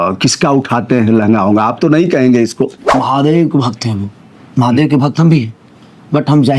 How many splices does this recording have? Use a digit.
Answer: 1